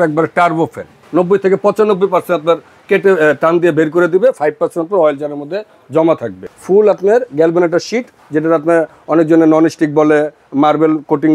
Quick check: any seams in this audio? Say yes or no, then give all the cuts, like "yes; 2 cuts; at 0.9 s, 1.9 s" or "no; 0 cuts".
yes; 2 cuts; at 1.0 s, 6.5 s